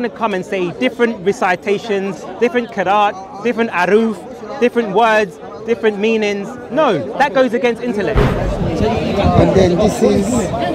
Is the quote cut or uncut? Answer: cut